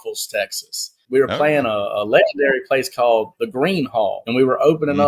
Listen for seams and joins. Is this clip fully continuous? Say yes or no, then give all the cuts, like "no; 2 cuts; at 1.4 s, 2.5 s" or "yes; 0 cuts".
no; 2 cuts; at 1.0 s, 4.2 s